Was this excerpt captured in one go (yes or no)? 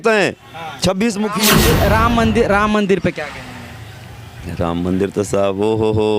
no